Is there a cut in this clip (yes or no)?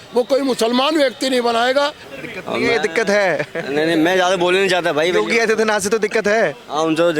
yes